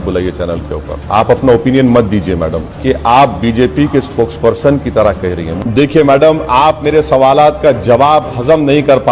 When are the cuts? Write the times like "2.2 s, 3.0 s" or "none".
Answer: 1.0 s, 2.7 s, 5.5 s

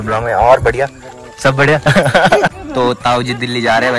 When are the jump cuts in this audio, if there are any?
2.5 s

